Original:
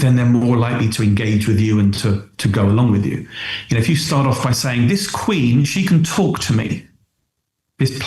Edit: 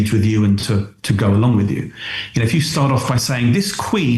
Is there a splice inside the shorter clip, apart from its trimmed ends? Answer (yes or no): no